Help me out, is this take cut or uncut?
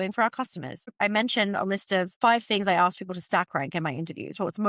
cut